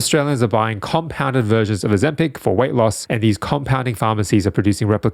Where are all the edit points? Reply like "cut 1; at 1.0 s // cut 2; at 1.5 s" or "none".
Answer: none